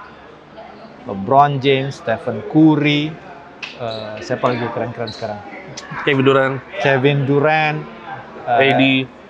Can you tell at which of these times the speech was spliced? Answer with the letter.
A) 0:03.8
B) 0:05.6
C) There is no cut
C